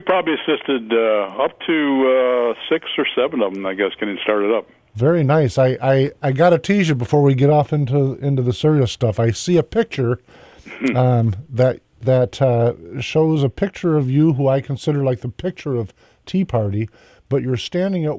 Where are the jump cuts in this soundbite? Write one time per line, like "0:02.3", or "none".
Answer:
0:13.3